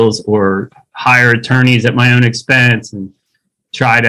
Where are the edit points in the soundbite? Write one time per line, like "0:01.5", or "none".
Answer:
none